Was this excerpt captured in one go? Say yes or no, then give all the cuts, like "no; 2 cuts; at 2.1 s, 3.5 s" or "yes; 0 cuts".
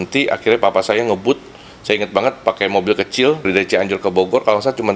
no; 1 cut; at 3.5 s